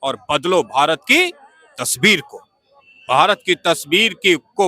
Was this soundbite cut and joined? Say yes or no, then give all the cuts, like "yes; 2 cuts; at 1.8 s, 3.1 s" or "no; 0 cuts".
no; 0 cuts